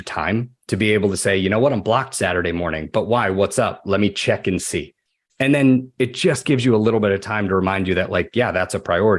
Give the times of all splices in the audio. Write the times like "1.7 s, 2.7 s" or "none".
none

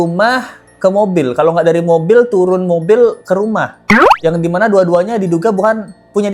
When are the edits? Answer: none

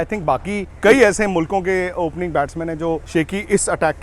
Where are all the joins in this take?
0.8 s, 3.0 s

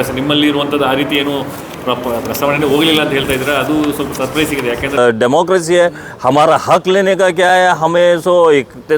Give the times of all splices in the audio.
5.0 s

